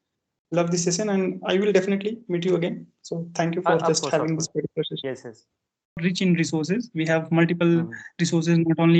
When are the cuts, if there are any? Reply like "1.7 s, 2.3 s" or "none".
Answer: 6.0 s